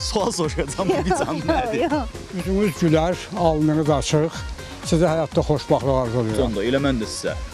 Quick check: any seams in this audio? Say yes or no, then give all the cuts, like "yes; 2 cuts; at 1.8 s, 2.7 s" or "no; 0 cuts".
yes; 1 cut; at 2.2 s